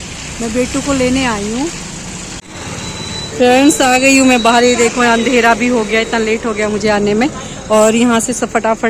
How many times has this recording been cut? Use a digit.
1